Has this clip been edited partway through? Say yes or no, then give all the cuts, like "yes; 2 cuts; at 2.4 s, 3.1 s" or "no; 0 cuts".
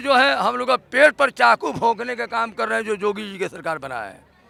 no; 0 cuts